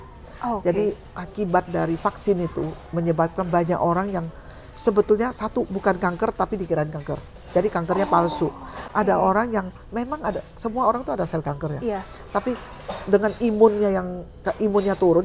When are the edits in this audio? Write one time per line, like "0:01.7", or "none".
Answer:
none